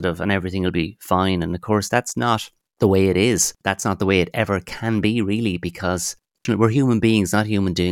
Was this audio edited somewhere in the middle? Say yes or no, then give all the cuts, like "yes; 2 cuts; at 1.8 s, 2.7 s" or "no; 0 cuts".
yes; 2 cuts; at 3.6 s, 6.4 s